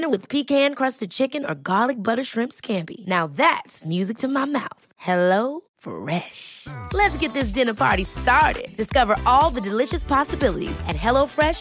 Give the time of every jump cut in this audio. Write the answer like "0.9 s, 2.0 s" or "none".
none

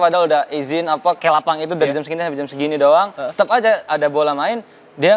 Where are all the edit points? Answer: 1.2 s

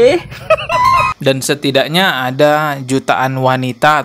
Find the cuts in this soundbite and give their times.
1.1 s

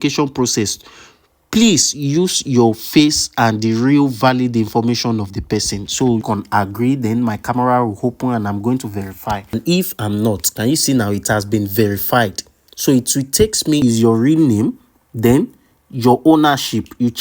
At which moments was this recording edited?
6.2 s, 9.5 s, 13.8 s

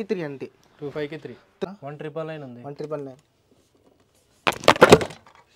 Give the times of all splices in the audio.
1.7 s

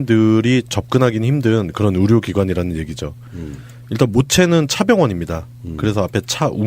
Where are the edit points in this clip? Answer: 5.6 s

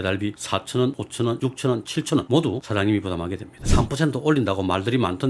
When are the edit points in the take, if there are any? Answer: 1.3 s, 3.5 s

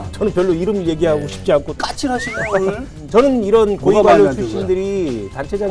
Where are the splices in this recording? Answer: 1.8 s, 2.9 s

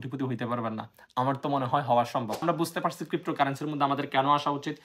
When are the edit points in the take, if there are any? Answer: 2.4 s

